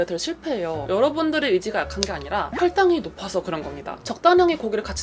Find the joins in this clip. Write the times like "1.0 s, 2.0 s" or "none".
0.8 s, 2.5 s, 4.1 s